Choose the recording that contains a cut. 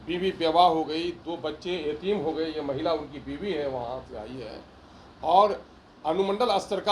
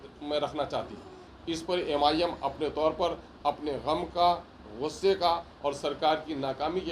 second; 1 cut; at 1.3 s

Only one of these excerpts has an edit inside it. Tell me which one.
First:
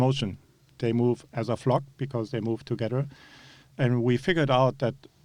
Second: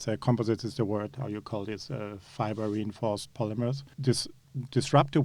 second; 1 cut; at 3.8 s

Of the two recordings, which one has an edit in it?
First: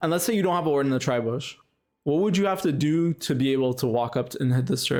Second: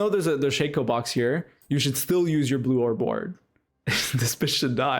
second; 1 cut; at 3.6 s

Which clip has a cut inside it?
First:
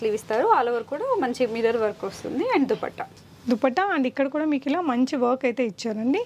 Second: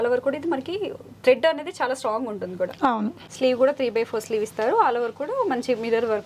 second; 1 cut; at 3.2 s

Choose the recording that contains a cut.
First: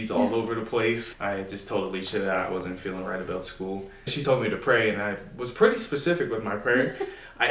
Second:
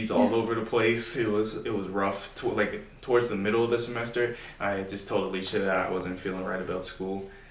first; 2 cuts; at 1.1 s, 4.2 s

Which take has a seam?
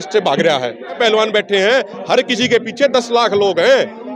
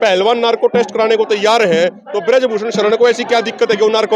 first; 1 cut; at 1.0 s

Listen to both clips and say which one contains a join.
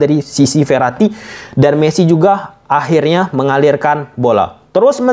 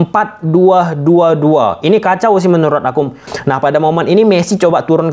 second; 1 cut; at 3.2 s

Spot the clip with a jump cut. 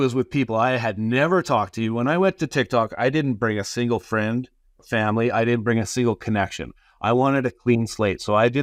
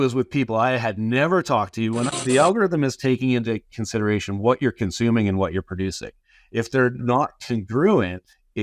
second; 1 cut; at 2.1 s

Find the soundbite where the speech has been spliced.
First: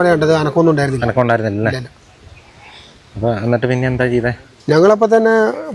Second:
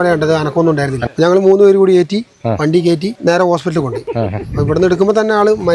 second; 2 cuts; at 1.0 s, 3.2 s

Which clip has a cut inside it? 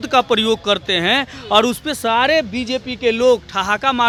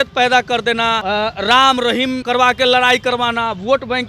second; 2 cuts; at 1.0 s, 2.2 s

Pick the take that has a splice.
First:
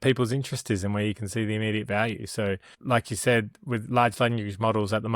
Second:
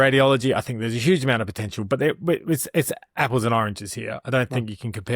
first; 1 cut; at 2.7 s

